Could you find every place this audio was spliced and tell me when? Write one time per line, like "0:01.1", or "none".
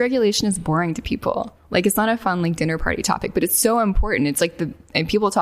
none